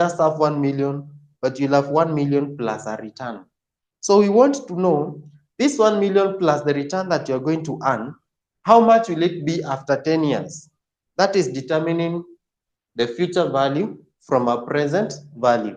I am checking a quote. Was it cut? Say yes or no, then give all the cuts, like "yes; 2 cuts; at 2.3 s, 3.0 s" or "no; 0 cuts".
no; 0 cuts